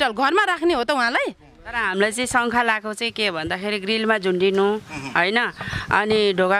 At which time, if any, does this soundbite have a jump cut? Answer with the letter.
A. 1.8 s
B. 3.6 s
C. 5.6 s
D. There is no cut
A